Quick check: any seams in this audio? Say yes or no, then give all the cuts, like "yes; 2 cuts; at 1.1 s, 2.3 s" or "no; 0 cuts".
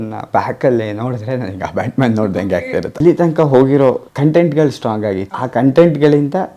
yes; 3 cuts; at 3.0 s, 4.1 s, 5.3 s